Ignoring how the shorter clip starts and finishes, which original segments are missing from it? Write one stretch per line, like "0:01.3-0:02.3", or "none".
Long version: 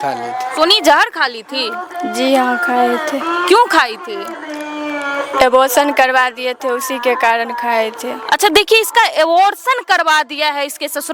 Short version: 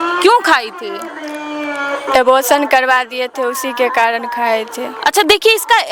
none